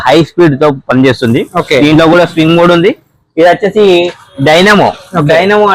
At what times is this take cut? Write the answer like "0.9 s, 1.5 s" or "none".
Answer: none